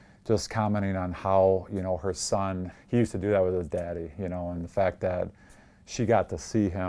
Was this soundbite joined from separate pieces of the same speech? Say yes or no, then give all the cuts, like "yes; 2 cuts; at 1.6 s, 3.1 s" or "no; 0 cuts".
yes; 1 cut; at 2.7 s